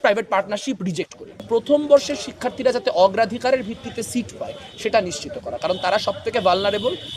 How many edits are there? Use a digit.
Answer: 1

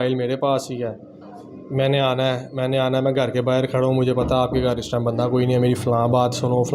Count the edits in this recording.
0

